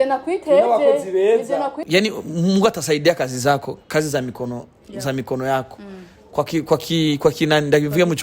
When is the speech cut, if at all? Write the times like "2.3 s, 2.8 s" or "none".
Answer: 1.8 s

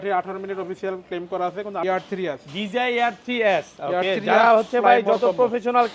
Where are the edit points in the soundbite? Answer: 1.8 s

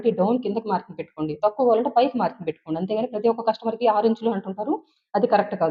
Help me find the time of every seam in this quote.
none

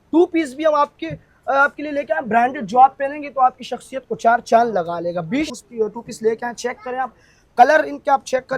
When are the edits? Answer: 5.6 s

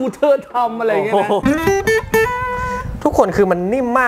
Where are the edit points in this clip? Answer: 1.4 s

